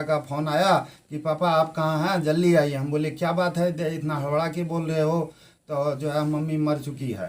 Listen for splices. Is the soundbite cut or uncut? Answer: uncut